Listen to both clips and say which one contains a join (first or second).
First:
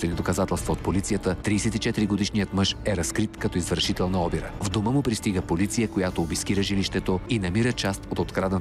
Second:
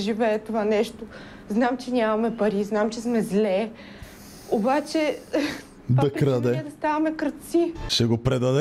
first